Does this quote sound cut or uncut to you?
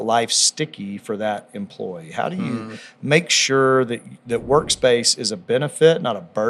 uncut